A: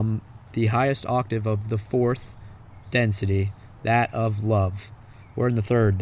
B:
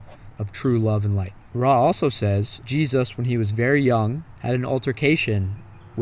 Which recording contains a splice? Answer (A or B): B